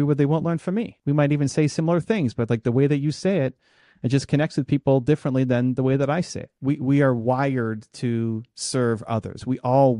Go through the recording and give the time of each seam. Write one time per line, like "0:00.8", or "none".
0:00.9
0:06.4